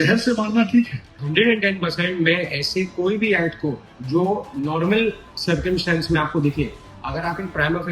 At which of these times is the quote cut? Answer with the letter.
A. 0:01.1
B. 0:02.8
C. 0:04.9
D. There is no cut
A